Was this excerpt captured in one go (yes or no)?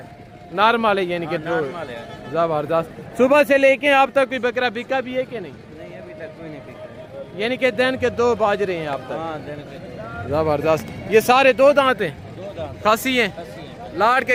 yes